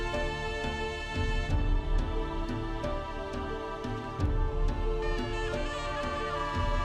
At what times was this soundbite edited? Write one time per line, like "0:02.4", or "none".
none